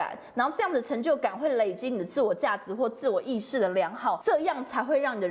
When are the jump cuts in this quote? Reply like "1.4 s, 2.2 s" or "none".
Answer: 4.2 s